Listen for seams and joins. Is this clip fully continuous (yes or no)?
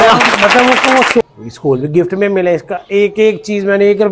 no